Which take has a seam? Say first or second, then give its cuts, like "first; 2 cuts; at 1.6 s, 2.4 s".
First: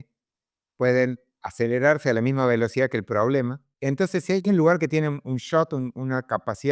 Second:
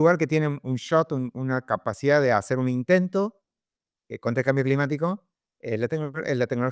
first; 1 cut; at 3.7 s